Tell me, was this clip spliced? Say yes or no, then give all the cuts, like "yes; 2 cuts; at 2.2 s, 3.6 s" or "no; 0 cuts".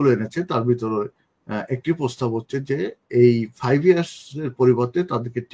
no; 0 cuts